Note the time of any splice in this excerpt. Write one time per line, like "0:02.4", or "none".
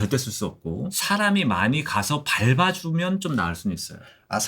0:01.0

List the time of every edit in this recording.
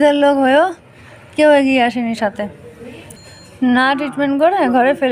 0:03.1

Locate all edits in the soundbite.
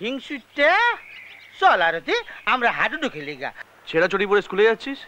0:03.7

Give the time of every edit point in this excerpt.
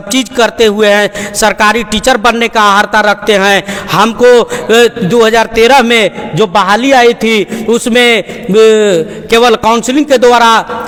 none

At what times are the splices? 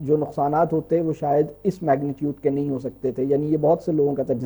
none

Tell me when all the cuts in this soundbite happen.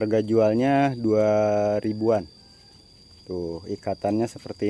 none

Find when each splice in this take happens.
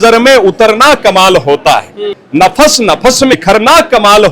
0:02.1
0:03.4

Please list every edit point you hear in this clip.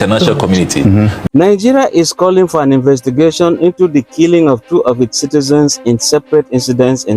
0:01.2

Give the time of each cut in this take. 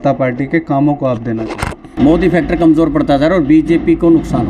0:02.0

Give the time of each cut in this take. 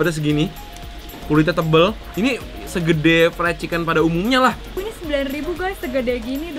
0:04.7

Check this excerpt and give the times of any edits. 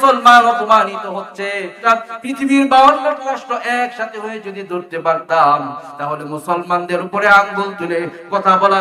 0:01.8

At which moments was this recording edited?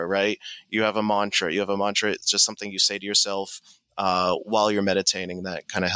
none

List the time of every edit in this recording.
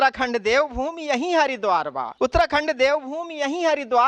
0:02.0

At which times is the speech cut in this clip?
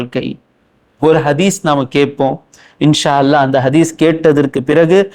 none

